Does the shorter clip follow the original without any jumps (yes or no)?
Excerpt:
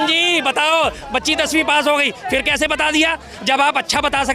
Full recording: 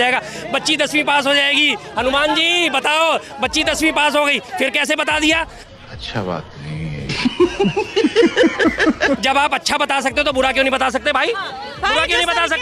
no